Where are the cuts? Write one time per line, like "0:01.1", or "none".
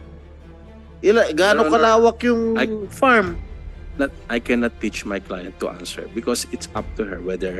0:00.9